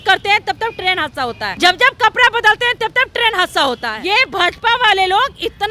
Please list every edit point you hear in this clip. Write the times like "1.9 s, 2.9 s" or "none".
1.5 s, 3.9 s

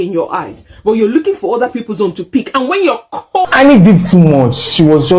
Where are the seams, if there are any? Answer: 3.4 s

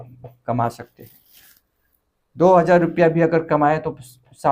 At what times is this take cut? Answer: none

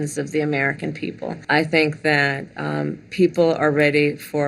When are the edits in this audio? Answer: 1.4 s

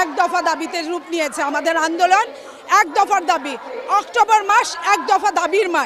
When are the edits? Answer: none

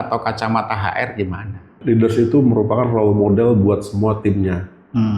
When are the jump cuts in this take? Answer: 1.7 s

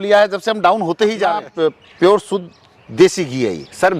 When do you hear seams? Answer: 1.5 s

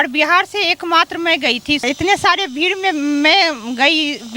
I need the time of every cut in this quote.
1.8 s

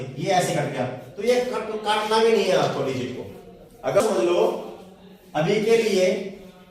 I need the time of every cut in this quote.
4.0 s

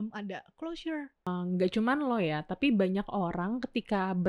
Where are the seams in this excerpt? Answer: 1.3 s

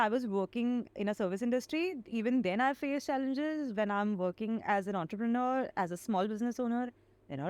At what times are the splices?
1.0 s

